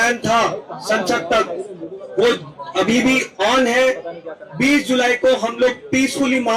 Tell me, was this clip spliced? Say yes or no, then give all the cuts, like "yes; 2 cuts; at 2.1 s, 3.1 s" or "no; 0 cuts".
no; 0 cuts